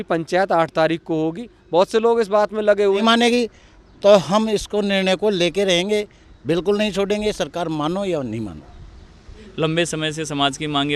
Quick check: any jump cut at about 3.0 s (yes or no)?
yes